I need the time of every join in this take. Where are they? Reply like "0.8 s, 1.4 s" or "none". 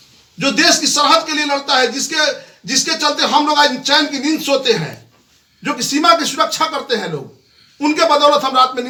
none